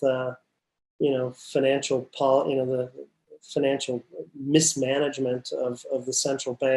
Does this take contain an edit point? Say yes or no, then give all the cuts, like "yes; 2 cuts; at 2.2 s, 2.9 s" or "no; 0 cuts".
no; 0 cuts